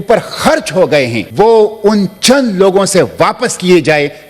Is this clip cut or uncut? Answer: cut